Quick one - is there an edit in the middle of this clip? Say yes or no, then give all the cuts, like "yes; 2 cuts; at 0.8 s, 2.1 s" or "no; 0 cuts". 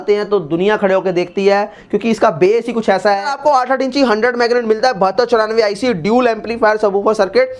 yes; 1 cut; at 3.3 s